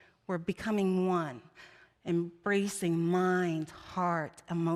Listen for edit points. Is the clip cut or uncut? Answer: uncut